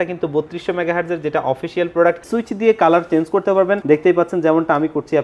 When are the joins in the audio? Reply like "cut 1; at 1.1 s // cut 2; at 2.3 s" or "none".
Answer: cut 1; at 2.3 s // cut 2; at 3.8 s